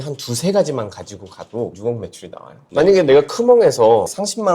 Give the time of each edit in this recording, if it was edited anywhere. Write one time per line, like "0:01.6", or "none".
none